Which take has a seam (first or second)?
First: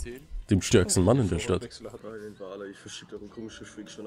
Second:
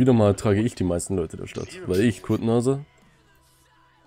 first